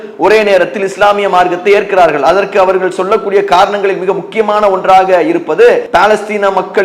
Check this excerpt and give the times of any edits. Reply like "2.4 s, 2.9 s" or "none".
5.9 s